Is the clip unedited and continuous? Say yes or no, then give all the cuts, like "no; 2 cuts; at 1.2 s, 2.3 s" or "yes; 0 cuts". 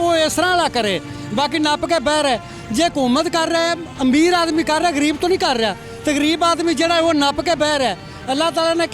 yes; 0 cuts